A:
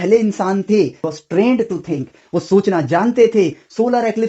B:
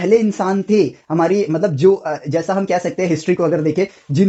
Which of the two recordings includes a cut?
A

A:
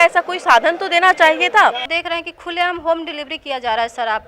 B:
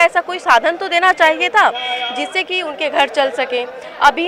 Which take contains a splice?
A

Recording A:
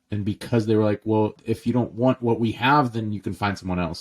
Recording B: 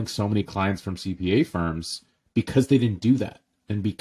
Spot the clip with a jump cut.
A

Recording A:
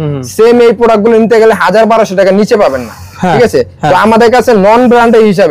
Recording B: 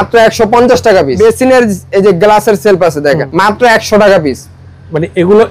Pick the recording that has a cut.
B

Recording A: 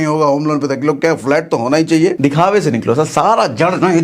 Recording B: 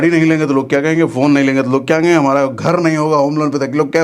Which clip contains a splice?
A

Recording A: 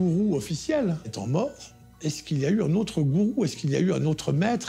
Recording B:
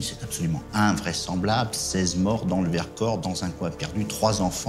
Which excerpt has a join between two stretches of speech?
A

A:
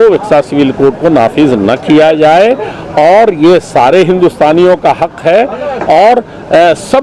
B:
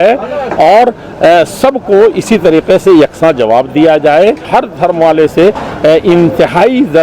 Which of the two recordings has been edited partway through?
B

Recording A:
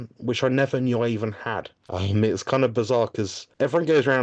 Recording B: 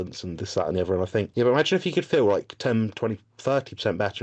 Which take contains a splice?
B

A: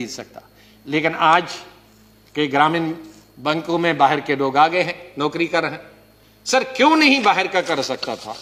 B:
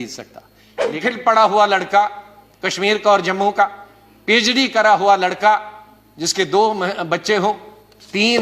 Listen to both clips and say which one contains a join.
B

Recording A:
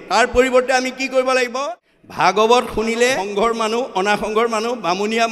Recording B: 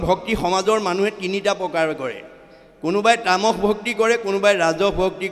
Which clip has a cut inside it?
A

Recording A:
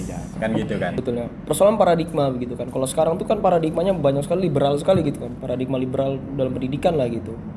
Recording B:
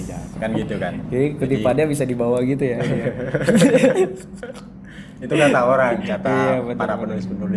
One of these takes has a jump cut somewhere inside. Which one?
A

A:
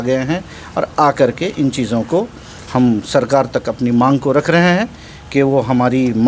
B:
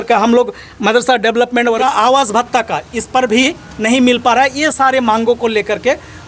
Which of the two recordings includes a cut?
B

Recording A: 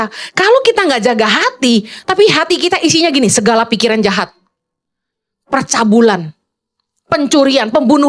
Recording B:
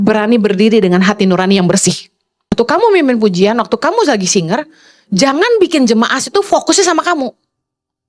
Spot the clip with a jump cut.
B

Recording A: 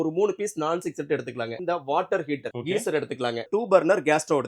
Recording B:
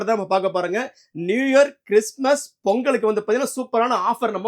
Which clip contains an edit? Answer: A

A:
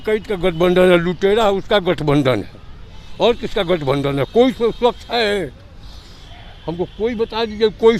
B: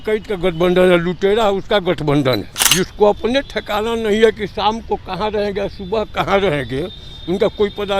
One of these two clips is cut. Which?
B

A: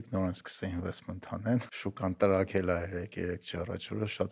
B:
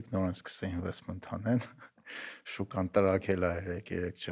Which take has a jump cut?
A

